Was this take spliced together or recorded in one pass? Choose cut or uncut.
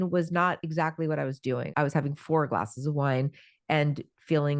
cut